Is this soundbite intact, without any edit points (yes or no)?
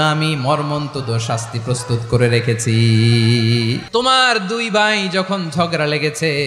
no